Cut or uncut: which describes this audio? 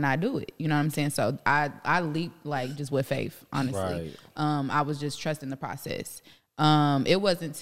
uncut